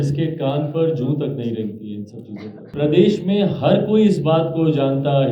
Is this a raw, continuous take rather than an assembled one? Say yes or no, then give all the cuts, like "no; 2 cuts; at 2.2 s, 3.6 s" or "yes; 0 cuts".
no; 1 cut; at 2.7 s